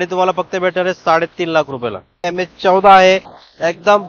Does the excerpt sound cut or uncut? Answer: cut